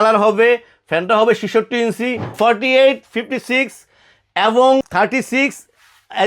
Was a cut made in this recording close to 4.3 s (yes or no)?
no